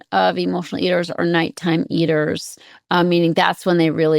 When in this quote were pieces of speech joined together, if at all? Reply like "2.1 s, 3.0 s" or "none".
none